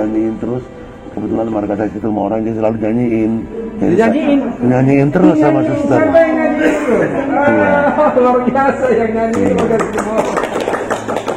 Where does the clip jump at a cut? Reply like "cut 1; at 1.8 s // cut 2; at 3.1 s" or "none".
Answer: cut 1; at 3.6 s